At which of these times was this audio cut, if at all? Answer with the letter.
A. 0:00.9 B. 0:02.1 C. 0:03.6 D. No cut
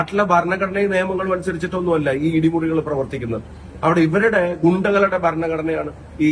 D